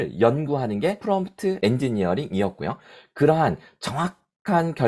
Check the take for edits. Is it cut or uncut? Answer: cut